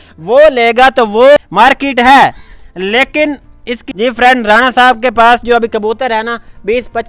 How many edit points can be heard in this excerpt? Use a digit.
2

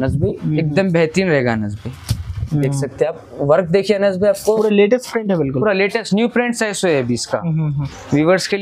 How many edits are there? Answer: 1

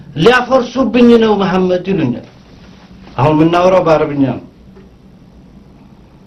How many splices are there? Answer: 0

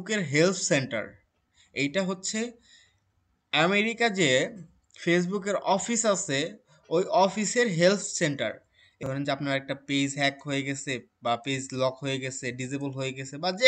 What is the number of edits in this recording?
1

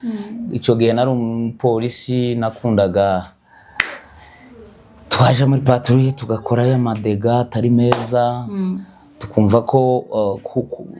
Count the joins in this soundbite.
0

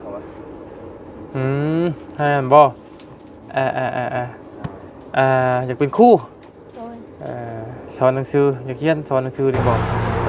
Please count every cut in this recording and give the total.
0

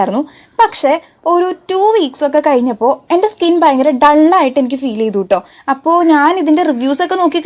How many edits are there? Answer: 1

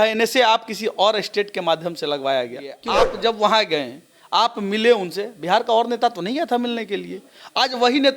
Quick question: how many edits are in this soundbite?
1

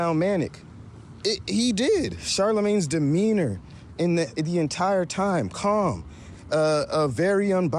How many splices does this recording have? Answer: 1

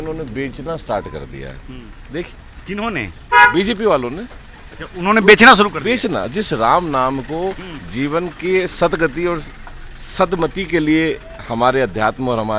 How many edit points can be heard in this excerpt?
0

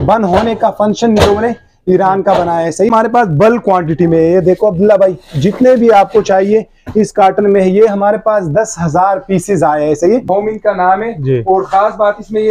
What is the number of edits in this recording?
2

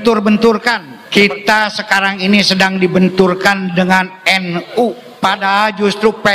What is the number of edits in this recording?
2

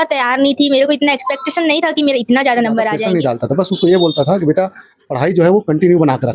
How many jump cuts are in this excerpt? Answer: 1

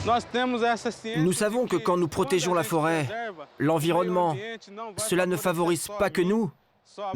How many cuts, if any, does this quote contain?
1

